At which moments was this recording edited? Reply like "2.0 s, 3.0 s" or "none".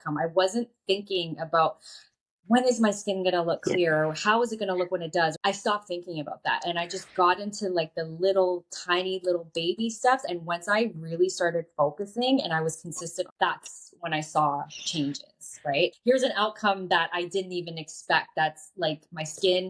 5.4 s, 10.2 s, 13.3 s, 15.9 s